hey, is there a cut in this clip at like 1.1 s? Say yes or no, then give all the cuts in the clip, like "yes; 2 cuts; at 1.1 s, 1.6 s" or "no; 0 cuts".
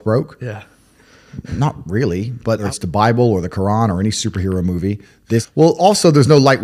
no; 2 cuts; at 2.6 s, 5.5 s